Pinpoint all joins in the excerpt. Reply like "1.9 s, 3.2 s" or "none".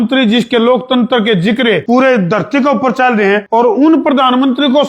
1.8 s, 3.4 s